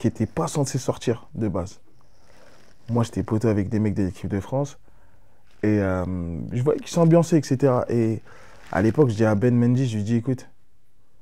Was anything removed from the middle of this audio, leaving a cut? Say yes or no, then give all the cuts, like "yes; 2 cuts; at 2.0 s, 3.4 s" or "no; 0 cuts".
no; 0 cuts